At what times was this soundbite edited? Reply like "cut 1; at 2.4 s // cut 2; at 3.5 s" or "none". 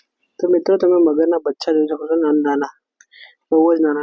none